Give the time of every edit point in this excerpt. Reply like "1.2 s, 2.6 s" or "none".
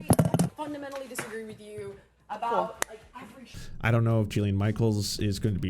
3.6 s